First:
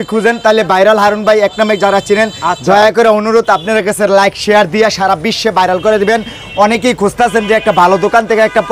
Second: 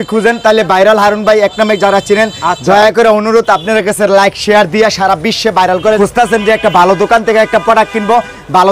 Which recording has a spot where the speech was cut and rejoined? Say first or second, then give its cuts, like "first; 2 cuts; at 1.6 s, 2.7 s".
second; 1 cut; at 6.0 s